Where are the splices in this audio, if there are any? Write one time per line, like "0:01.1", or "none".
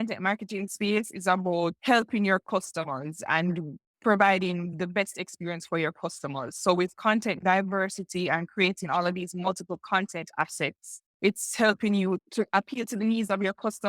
0:01.8